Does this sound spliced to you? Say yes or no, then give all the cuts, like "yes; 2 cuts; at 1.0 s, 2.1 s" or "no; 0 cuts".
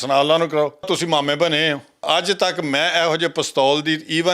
yes; 2 cuts; at 0.9 s, 2.0 s